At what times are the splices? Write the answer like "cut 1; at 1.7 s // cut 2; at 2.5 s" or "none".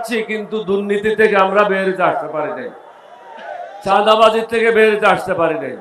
none